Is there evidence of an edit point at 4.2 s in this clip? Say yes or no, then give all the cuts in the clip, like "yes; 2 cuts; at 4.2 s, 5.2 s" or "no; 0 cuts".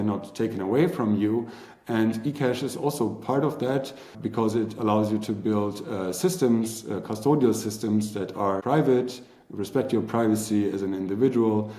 yes; 2 cuts; at 4.2 s, 8.6 s